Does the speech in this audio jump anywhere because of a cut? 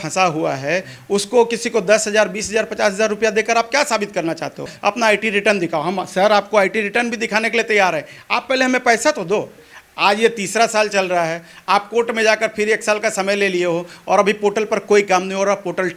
yes; 2 cuts; at 4.7 s, 9.6 s

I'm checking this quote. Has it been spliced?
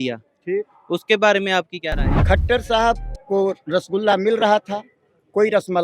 yes; 1 cut; at 2.1 s

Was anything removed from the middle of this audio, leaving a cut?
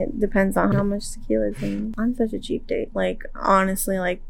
yes; 2 cuts; at 0.7 s, 1.9 s

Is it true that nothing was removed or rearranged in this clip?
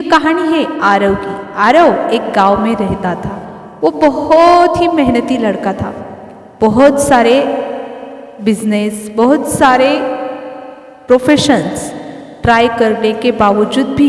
yes; 0 cuts

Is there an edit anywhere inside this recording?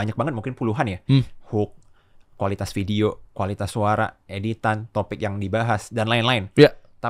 no; 0 cuts

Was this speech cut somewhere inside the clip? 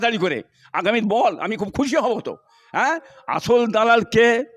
no; 0 cuts

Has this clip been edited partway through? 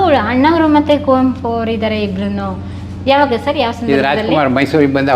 no; 0 cuts

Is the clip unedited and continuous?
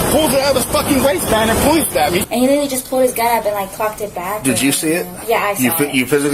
no; 1 cut; at 2.2 s

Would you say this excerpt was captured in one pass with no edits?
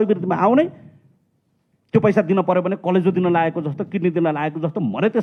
yes; 0 cuts

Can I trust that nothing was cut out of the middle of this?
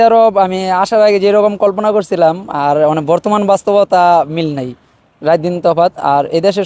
yes; 0 cuts

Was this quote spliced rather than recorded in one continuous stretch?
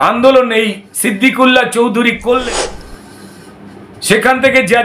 yes; 1 cut; at 2.4 s

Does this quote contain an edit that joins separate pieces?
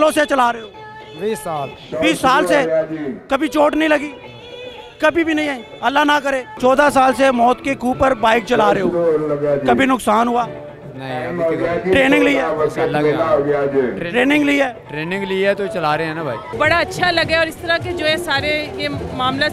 yes; 2 cuts; at 6.5 s, 16.5 s

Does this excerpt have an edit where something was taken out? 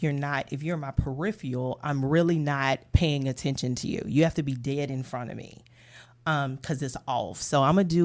no; 0 cuts

